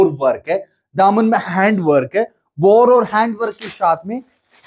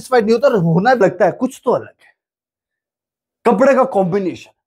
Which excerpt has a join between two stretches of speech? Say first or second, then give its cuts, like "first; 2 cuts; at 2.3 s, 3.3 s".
second; 1 cut; at 1.0 s